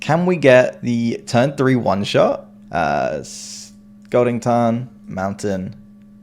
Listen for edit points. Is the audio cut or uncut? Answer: cut